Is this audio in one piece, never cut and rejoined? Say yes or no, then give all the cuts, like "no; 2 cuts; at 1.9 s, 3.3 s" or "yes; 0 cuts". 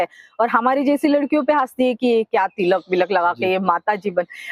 yes; 0 cuts